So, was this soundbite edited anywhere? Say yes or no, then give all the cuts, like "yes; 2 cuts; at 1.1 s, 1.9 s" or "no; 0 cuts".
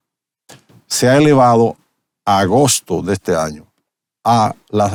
no; 0 cuts